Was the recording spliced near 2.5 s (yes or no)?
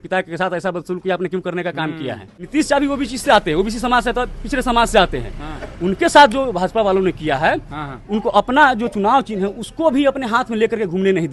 yes